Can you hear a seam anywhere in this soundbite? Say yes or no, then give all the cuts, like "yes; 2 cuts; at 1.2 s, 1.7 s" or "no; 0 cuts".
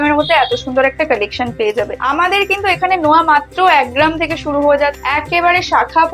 yes; 2 cuts; at 2.0 s, 5.0 s